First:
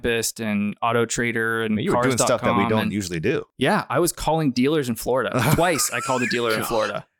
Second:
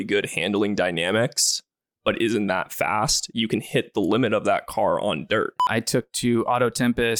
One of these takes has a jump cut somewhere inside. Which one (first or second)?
second